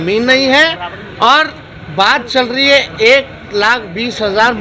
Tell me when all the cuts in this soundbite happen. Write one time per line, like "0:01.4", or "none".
none